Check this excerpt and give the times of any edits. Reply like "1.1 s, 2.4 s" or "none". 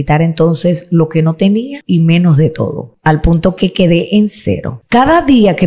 1.8 s, 2.9 s, 4.7 s